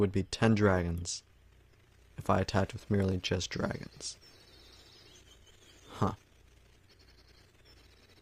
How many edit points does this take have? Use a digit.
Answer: 1